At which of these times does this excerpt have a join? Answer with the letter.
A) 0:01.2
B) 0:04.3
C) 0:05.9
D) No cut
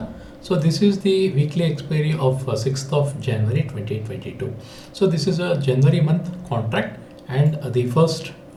D